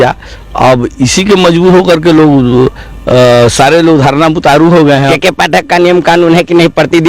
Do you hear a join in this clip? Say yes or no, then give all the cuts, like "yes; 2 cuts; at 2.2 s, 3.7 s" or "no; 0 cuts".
yes; 1 cut; at 5.1 s